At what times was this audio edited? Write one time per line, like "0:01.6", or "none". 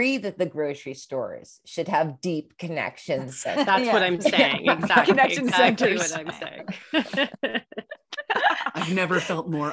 none